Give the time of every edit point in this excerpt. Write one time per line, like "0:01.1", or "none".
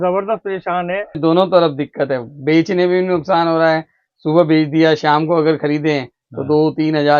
0:01.2